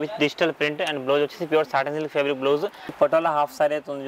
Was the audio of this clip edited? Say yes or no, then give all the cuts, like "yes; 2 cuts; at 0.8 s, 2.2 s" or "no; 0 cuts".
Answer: yes; 1 cut; at 2.9 s